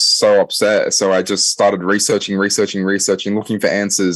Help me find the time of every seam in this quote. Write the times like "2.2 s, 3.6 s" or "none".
none